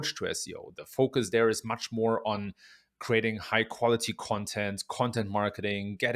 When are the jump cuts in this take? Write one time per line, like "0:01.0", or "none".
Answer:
none